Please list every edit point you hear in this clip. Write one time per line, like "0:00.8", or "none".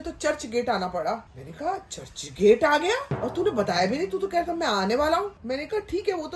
0:01.3
0:05.3